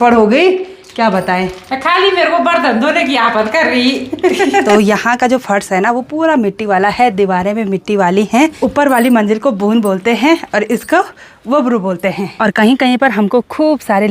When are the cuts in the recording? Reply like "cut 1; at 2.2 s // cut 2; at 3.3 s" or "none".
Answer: cut 1; at 4.7 s // cut 2; at 8.5 s // cut 3; at 12.3 s